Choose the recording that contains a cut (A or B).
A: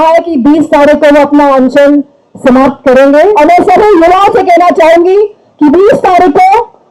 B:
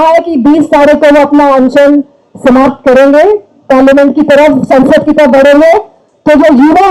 A